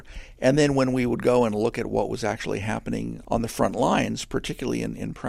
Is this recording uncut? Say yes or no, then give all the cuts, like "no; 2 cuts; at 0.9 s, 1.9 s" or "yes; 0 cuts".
no; 1 cut; at 3.2 s